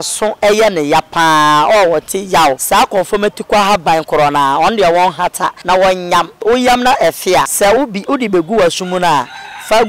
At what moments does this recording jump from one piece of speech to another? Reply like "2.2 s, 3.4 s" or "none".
2.6 s, 5.6 s, 6.3 s, 7.5 s